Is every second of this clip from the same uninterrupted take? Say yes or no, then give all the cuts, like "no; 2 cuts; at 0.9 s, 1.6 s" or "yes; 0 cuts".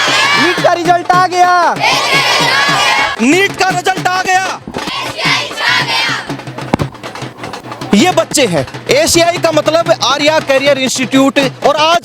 yes; 0 cuts